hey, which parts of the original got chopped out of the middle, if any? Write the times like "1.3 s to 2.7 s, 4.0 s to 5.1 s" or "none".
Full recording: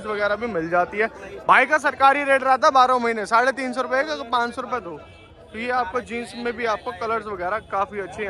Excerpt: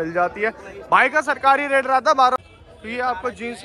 2.9 s to 5.1 s